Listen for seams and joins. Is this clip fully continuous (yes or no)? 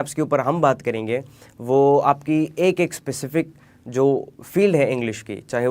yes